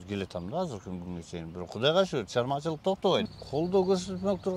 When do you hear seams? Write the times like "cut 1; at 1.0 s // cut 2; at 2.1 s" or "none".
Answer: cut 1; at 3.3 s